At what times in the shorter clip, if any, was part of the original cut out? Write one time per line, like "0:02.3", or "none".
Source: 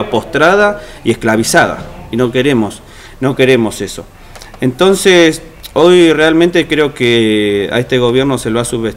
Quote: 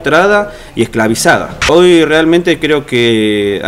0:01.5